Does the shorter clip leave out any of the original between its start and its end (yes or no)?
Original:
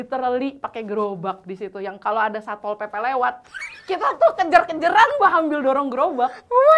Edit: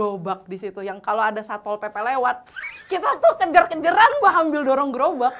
no